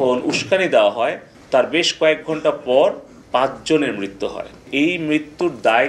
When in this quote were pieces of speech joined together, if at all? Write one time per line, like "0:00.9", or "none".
0:01.3
0:03.1
0:04.7